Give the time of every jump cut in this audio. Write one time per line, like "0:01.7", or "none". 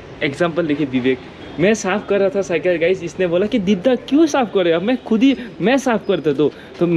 none